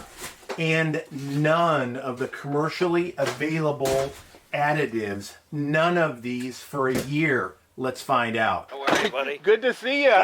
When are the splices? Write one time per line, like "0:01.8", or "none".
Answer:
none